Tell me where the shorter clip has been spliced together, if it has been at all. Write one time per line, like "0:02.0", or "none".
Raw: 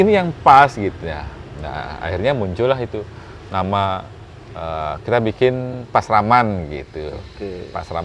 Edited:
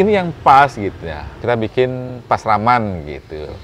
0:01.3